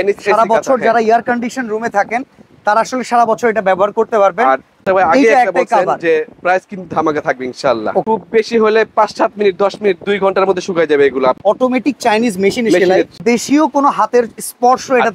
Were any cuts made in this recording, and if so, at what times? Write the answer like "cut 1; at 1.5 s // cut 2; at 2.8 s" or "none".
cut 1; at 4.8 s // cut 2; at 8.0 s // cut 3; at 11.4 s // cut 4; at 13.2 s